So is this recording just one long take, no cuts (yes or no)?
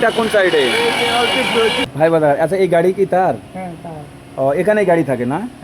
no